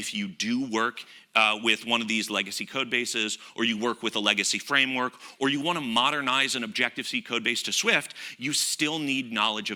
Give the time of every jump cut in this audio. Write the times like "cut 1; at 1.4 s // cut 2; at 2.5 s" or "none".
none

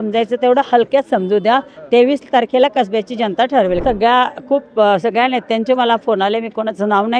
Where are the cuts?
cut 1; at 3.8 s

